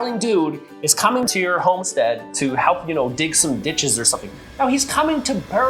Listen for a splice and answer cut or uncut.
cut